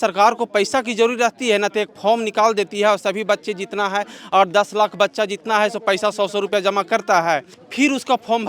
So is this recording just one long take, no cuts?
no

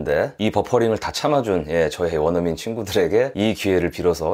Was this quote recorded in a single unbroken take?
yes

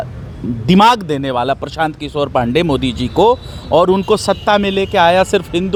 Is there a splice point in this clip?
no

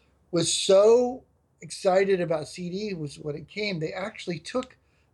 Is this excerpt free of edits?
yes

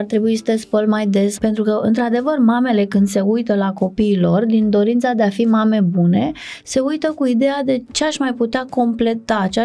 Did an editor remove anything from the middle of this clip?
yes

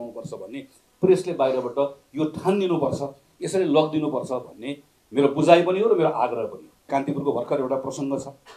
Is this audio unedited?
no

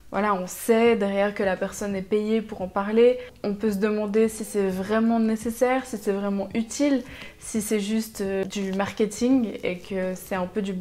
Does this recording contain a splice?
no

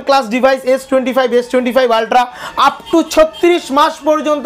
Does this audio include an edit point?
no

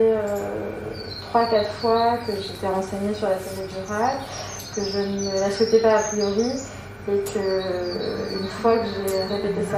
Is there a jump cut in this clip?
no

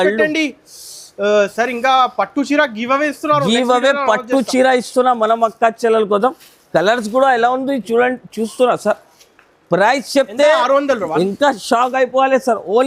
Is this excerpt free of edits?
yes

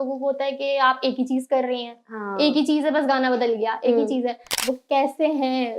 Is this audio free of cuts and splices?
no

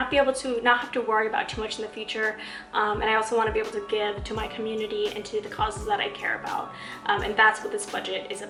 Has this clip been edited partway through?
no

